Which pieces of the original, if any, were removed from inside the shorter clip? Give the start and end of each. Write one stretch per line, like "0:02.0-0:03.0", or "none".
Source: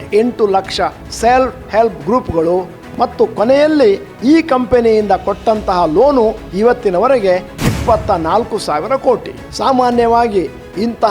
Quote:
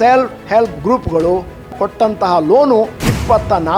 0:03.0-0:05.2
0:06.4-0:07.5